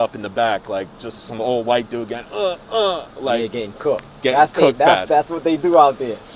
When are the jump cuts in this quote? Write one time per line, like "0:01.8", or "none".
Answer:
none